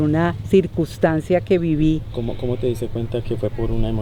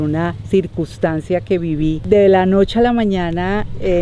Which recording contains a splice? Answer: second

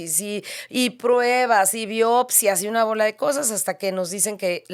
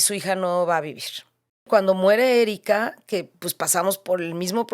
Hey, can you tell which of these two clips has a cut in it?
second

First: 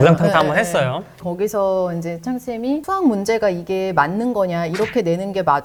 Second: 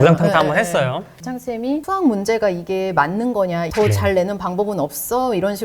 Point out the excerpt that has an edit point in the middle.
second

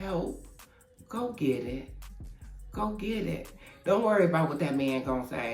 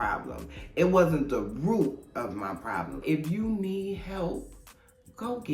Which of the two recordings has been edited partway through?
second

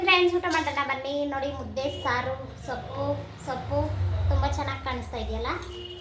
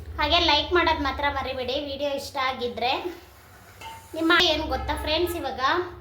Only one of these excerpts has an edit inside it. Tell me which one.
second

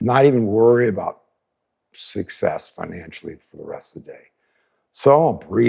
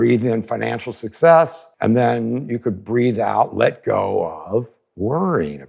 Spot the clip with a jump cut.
second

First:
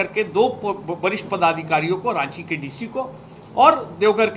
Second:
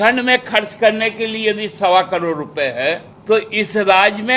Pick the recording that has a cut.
second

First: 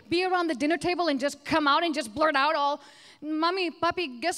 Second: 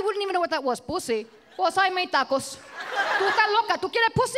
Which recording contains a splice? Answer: second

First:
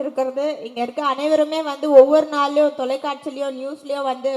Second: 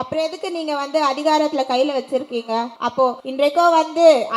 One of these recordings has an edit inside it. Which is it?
second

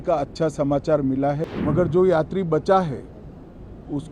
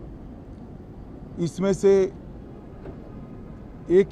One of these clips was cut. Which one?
first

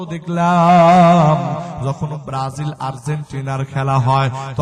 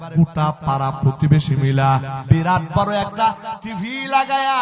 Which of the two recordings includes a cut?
second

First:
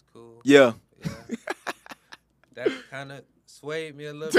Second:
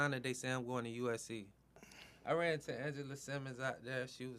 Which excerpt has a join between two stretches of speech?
second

